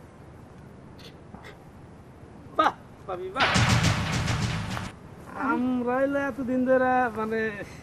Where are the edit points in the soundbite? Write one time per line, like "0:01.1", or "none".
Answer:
0:03.5
0:05.3